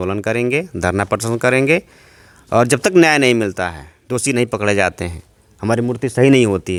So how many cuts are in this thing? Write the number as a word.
zero